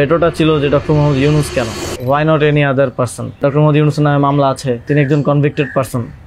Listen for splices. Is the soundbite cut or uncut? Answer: cut